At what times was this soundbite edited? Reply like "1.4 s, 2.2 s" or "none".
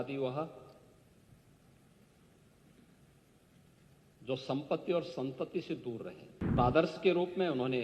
6.6 s